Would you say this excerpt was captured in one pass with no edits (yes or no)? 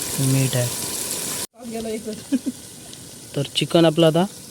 no